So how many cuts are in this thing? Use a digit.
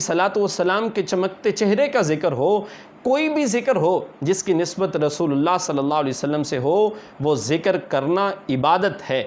0